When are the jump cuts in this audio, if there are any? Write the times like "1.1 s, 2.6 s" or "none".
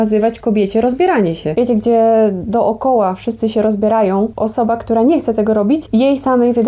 1.4 s, 4.3 s, 5.8 s